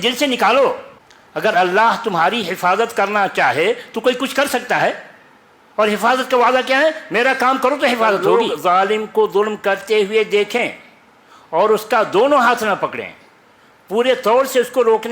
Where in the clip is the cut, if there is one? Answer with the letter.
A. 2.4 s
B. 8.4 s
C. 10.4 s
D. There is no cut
B